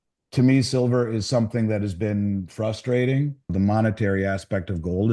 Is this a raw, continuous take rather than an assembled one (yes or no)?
no